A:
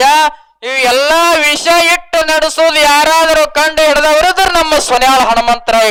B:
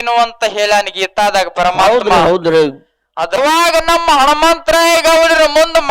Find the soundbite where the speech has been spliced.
B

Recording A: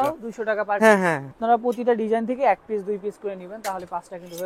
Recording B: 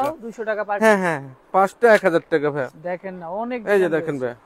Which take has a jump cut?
A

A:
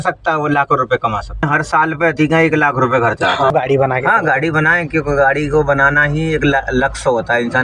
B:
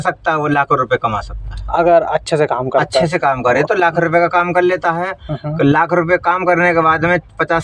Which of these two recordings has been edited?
A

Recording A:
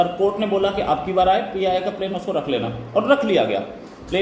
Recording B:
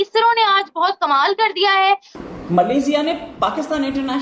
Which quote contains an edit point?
B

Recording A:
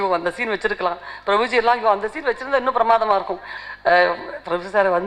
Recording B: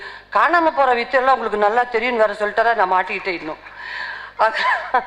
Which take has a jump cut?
A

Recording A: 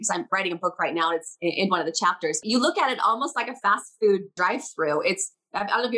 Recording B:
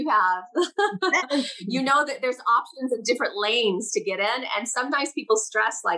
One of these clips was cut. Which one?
A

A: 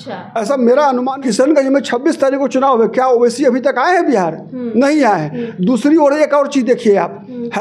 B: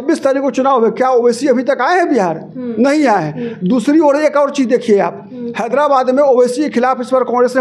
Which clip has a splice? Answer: A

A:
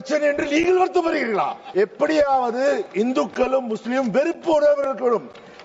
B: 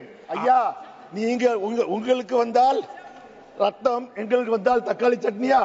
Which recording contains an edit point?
A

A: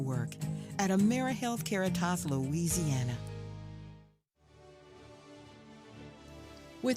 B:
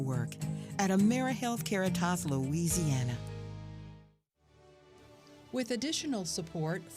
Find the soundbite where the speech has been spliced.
B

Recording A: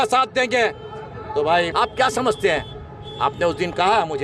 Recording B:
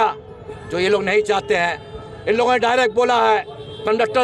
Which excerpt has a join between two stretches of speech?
A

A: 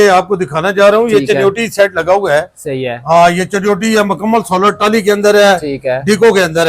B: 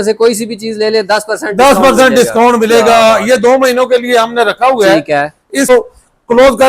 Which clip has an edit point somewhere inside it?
B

